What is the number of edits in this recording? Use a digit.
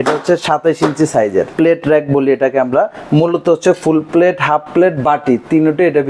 1